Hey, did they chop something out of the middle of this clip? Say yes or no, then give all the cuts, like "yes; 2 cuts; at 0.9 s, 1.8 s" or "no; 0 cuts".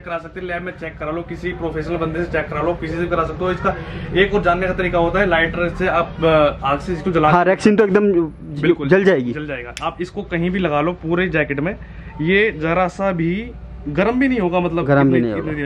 no; 0 cuts